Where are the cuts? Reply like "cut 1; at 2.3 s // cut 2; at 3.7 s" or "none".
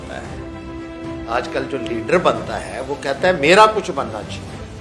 cut 1; at 1.7 s